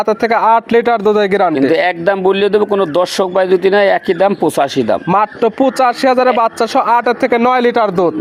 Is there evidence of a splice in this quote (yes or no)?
no